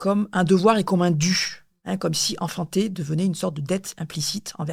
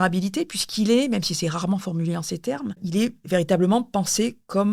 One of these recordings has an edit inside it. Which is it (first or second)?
second